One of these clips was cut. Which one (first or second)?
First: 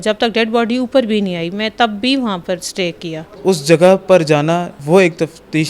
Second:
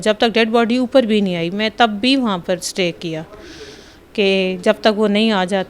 first